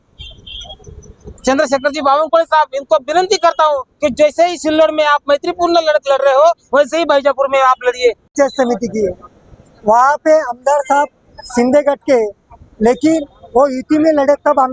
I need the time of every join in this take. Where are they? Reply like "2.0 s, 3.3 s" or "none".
8.3 s